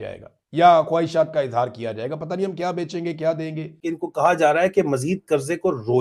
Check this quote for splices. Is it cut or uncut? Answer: cut